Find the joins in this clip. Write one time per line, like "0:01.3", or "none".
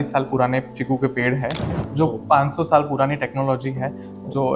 0:01.8